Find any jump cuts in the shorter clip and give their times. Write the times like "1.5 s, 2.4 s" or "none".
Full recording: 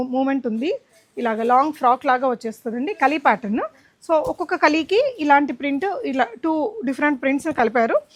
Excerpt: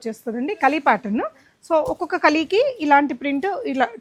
none

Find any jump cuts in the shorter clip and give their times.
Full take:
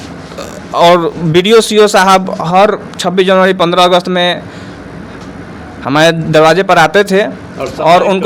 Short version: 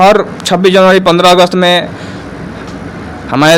none

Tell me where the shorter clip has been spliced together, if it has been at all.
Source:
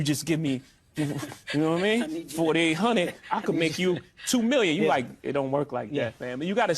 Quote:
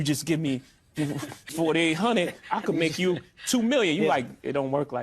1.4 s

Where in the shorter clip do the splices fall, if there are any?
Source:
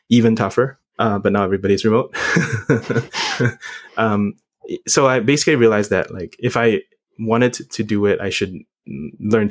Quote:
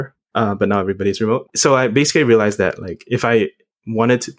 1.5 s

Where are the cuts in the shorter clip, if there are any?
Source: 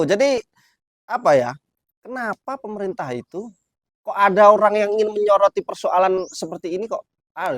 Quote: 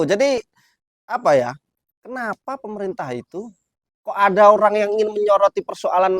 none

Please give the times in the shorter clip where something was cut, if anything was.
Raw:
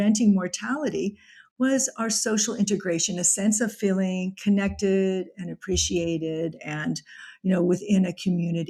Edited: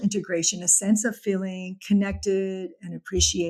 none

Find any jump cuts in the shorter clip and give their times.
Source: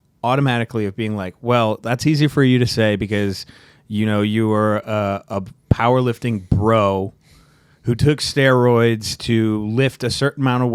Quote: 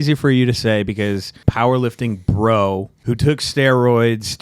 1.3 s, 2.9 s

